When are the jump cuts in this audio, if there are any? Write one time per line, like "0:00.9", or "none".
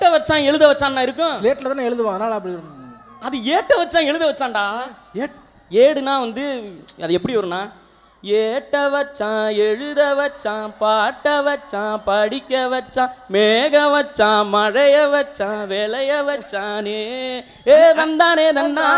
none